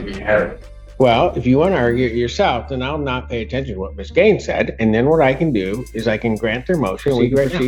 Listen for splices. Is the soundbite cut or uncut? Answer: uncut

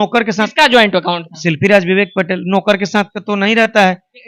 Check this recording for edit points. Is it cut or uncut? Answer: uncut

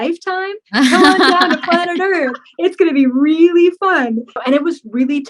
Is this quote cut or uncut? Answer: cut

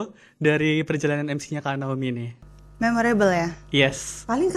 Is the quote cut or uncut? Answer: uncut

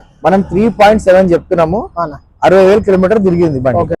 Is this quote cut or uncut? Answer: uncut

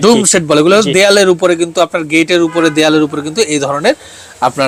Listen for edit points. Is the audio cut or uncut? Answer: uncut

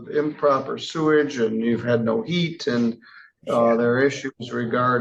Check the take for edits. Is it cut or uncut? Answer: uncut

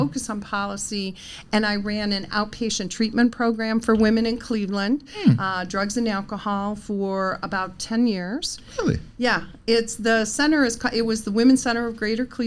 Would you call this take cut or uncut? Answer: uncut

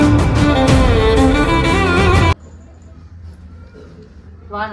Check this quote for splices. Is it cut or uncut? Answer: uncut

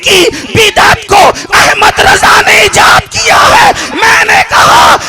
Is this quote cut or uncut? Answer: uncut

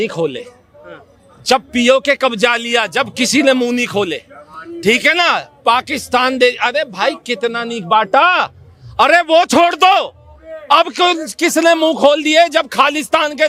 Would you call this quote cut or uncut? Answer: uncut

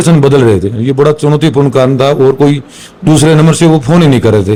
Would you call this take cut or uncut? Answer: uncut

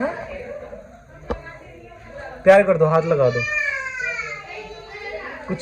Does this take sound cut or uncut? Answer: uncut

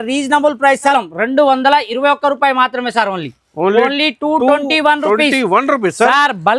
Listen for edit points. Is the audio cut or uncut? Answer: cut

